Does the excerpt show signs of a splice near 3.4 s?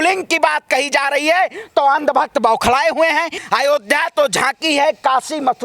yes; 1 cut; at 3.4 s

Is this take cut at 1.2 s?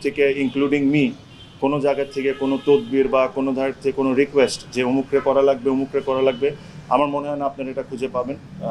no; 0 cuts

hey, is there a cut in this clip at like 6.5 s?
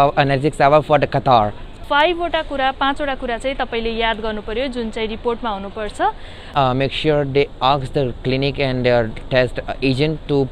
yes; 2 cuts; at 1.8 s, 6.5 s

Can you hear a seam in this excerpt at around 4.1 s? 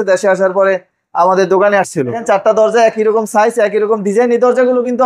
no; 1 cut; at 2.2 s

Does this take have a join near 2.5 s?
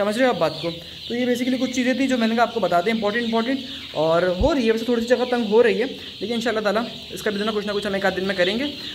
no; 0 cuts

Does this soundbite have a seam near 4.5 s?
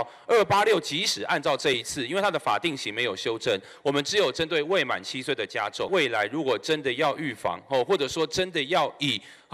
no; 1 cut; at 5.9 s

